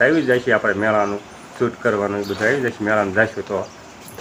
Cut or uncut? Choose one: uncut